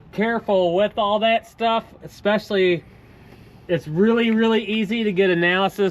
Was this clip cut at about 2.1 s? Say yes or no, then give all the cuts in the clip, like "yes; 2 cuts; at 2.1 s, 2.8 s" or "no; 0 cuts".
no; 0 cuts